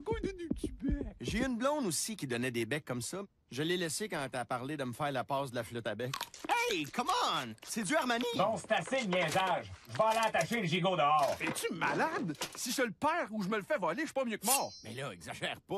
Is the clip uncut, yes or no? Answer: yes